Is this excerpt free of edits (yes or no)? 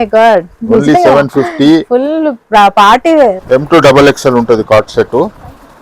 no